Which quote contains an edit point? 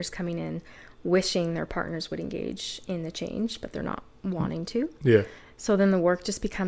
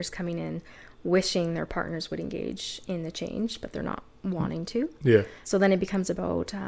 second; 1 cut; at 5.4 s

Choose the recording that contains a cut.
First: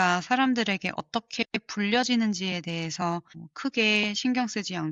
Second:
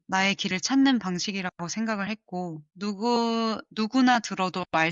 second; 1 cut; at 2.7 s

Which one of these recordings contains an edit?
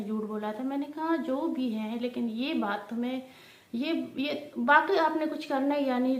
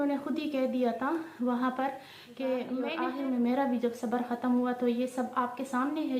second; 1 cut; at 2.9 s

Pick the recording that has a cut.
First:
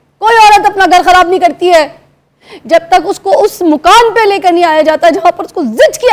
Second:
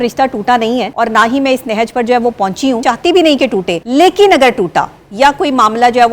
second; 3 cuts; at 0.9 s, 2.8 s, 3.8 s

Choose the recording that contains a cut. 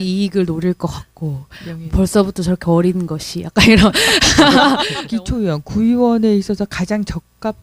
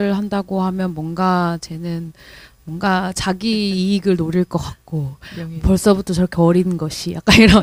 first; 1 cut; at 5.0 s

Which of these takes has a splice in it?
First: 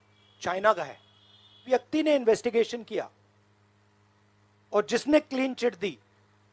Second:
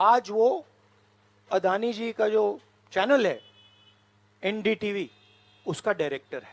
first; 1 cut; at 1.6 s

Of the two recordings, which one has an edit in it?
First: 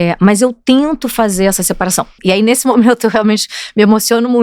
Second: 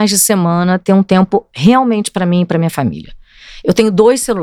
first; 1 cut; at 2.2 s

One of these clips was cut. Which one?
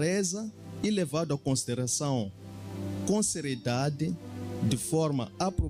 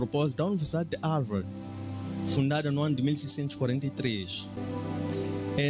second; 1 cut; at 4.6 s

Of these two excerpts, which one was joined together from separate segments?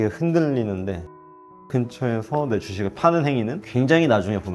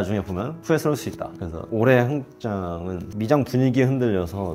second; 2 cuts; at 1.4 s, 3.0 s

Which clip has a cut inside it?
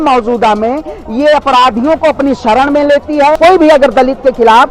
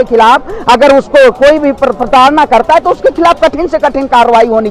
first; 1 cut; at 3.4 s

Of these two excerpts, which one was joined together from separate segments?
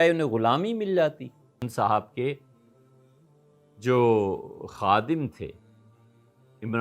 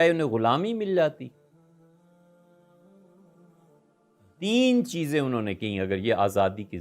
first; 1 cut; at 1.6 s

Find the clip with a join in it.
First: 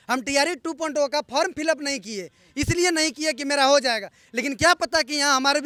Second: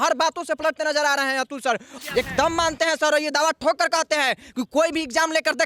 second; 1 cut; at 1.9 s

